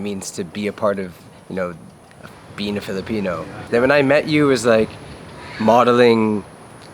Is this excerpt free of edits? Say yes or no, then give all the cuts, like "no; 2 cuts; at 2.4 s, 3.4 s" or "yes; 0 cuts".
no; 1 cut; at 3.5 s